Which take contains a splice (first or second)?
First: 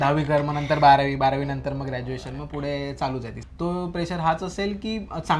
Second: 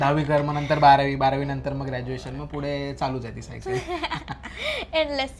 first